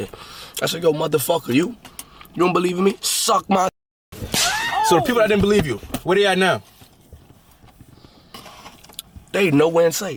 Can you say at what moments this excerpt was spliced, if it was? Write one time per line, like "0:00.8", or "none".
none